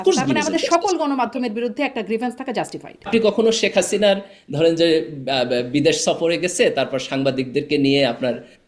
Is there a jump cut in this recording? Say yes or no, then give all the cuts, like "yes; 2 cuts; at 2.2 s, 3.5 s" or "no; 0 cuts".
yes; 1 cut; at 3.0 s